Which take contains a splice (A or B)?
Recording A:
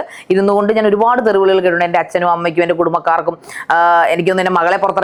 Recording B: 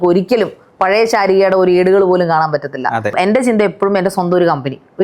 B